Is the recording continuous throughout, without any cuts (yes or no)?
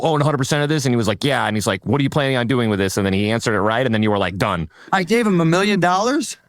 no